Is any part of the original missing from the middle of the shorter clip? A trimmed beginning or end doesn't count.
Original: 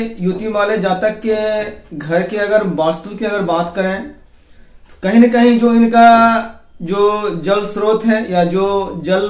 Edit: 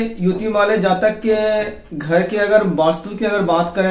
no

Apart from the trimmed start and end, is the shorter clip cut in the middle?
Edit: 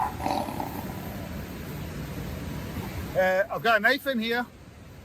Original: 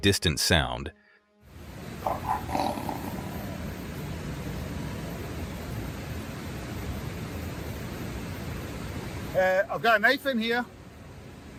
yes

